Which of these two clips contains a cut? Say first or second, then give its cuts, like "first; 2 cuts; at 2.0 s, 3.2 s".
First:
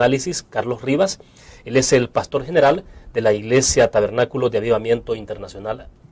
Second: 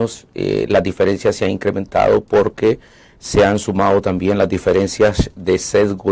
second; 1 cut; at 4.6 s